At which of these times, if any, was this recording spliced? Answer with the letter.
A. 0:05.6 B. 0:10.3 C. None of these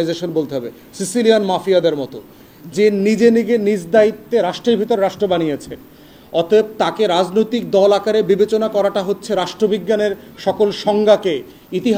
C